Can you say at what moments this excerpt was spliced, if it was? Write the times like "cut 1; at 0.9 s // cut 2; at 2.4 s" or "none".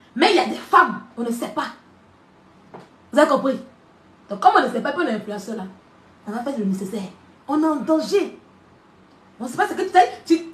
cut 1; at 7.3 s